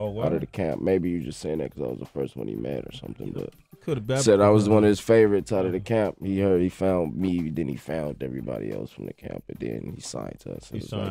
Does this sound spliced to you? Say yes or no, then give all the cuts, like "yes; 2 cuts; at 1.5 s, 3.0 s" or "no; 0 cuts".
yes; 1 cut; at 3.8 s